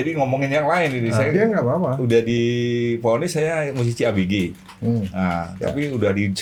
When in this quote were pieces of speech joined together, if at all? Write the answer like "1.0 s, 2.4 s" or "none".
none